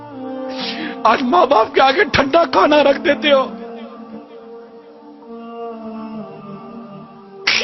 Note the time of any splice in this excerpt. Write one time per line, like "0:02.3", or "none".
0:02.8